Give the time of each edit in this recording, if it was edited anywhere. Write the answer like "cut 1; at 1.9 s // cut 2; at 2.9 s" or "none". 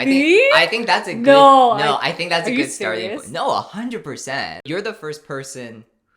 cut 1; at 4.6 s